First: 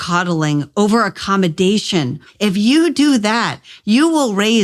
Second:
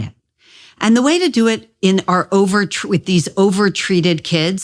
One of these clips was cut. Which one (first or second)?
first